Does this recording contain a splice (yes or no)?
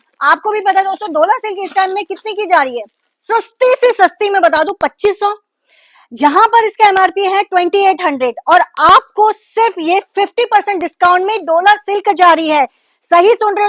no